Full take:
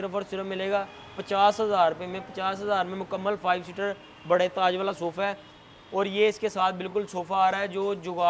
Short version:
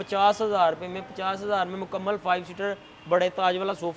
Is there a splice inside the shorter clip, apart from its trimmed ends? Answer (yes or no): no